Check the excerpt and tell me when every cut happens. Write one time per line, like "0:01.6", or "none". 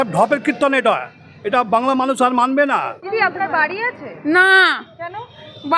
0:03.0